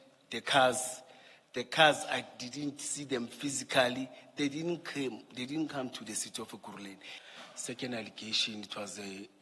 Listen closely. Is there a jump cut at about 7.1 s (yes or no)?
yes